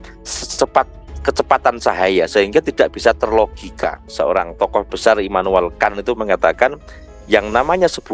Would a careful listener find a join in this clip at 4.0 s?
yes; 1 cut; at 4.0 s

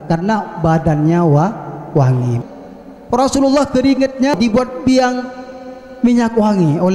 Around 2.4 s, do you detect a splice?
yes; 2 cuts; at 2.4 s, 4.4 s

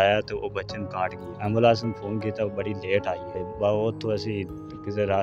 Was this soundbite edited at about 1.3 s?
yes; 2 cuts; at 1.3 s, 3.4 s

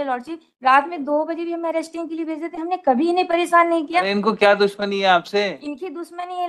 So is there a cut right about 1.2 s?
no; 1 cut; at 4.1 s

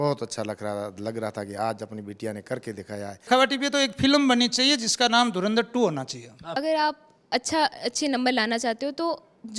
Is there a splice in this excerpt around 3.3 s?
yes; 2 cuts; at 3.3 s, 6.4 s

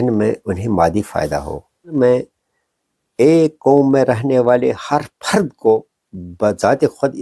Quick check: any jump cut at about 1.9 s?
yes; 1 cut; at 1.9 s

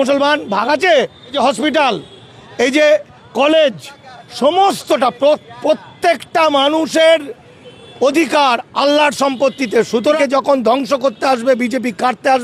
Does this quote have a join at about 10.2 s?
yes; 2 cuts; at 1.3 s, 10.2 s

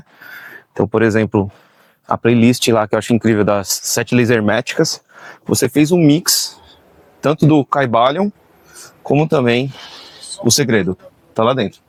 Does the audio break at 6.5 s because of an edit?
no; 0 cuts

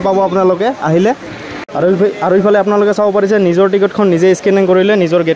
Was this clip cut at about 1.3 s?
no; 0 cuts

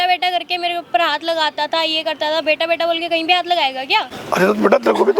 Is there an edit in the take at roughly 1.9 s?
no; 1 cut; at 4.2 s

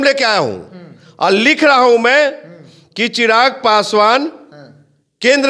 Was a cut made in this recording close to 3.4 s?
no; 0 cuts

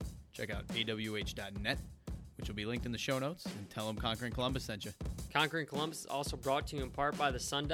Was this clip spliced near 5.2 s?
yes; 1 cut; at 5.2 s

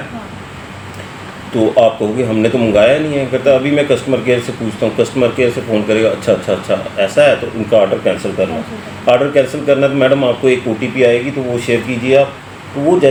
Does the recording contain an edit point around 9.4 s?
no; 0 cuts

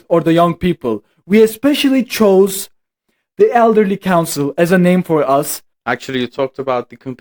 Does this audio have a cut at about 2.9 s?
no; 1 cut; at 5.7 s

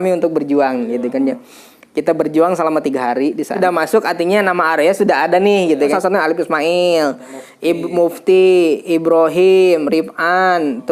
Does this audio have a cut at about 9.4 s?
no; 2 cuts; at 3.6 s, 5.9 s

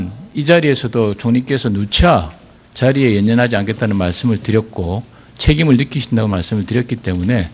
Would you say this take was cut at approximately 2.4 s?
no; 1 cut; at 5.1 s

